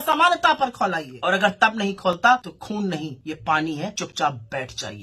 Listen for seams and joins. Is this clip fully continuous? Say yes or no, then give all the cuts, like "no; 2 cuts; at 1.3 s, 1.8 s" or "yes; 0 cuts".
no; 3 cuts; at 1.1 s, 2.9 s, 4.0 s